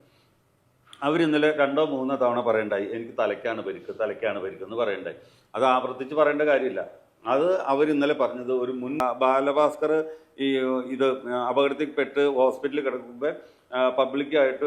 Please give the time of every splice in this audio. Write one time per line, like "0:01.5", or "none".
0:09.0